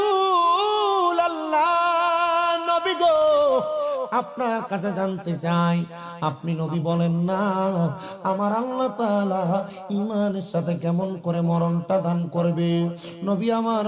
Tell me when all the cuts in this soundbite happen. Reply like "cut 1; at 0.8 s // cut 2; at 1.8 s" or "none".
none